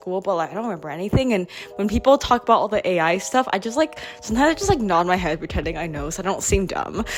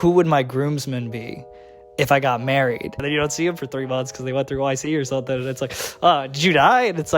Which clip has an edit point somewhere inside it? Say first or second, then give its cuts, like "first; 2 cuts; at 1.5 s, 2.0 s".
second; 1 cut; at 3.0 s